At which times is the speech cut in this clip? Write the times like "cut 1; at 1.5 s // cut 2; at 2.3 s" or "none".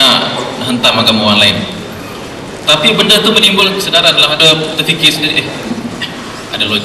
cut 1; at 4.4 s